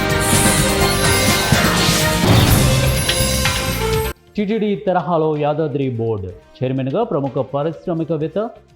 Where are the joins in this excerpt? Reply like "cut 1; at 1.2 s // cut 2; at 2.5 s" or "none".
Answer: cut 1; at 4.1 s